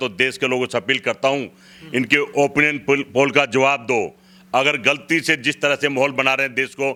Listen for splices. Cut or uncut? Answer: uncut